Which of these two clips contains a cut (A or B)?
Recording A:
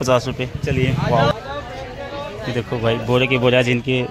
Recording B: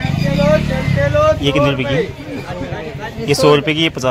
A